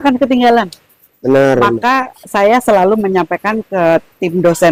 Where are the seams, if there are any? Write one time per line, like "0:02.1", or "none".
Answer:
none

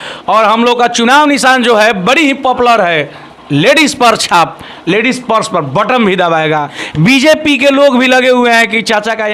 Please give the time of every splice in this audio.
0:06.8

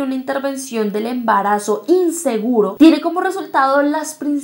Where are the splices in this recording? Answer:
0:02.7

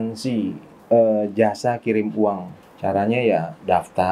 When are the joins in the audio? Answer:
none

